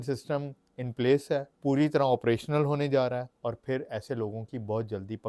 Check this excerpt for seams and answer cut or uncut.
cut